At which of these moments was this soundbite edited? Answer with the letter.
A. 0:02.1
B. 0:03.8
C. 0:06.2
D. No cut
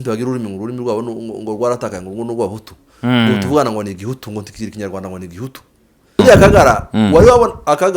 C